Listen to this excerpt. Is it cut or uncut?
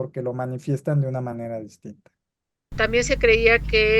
cut